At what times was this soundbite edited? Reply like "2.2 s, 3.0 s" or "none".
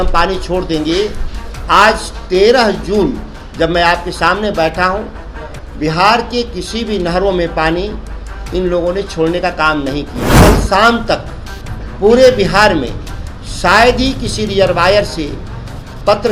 10.3 s